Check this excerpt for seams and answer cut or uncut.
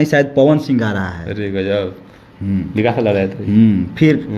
uncut